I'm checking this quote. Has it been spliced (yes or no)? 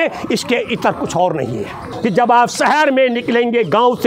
yes